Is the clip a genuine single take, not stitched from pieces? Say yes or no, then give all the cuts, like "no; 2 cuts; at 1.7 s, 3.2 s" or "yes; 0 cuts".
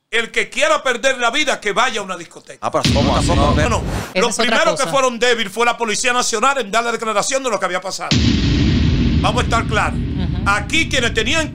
no; 1 cut; at 3.7 s